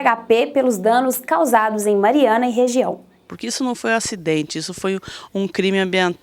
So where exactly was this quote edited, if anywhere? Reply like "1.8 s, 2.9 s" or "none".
3.3 s

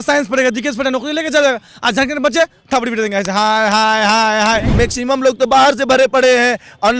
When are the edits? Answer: 4.7 s

